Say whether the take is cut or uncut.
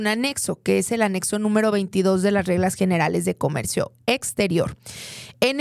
uncut